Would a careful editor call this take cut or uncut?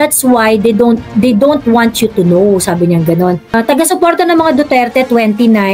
uncut